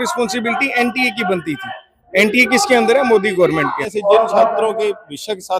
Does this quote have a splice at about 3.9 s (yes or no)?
yes